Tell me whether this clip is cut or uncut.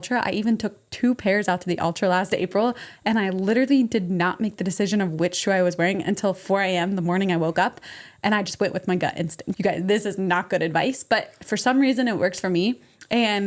cut